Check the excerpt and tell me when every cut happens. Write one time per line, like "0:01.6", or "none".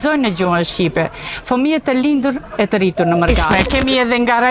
0:03.5